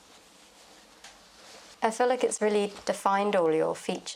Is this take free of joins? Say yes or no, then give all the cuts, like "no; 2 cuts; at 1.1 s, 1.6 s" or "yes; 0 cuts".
no; 1 cut; at 1.7 s